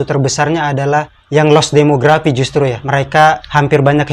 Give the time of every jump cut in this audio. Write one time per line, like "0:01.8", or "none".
0:01.2
0:02.8